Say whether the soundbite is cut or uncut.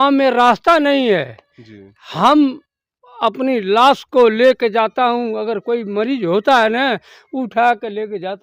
uncut